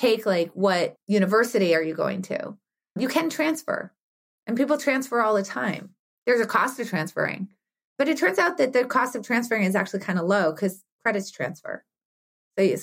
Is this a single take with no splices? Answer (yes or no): no